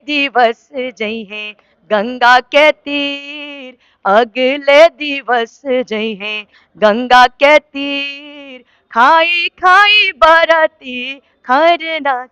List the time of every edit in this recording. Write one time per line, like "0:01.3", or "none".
none